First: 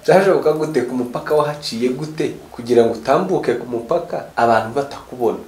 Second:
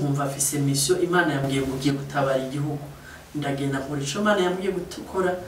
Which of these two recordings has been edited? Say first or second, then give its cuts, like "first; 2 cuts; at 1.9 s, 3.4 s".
first; 2 cuts; at 2.5 s, 4.2 s